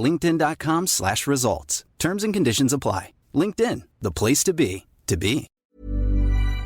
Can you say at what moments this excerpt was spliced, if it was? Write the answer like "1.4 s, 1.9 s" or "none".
5.5 s